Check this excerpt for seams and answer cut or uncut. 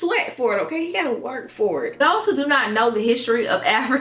cut